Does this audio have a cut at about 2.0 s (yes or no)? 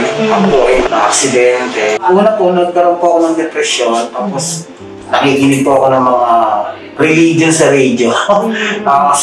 yes